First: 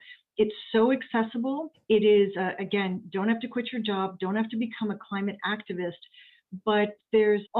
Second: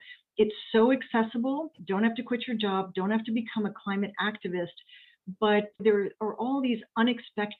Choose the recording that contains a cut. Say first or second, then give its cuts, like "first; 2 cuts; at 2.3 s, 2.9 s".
second; 2 cuts; at 1.7 s, 5.8 s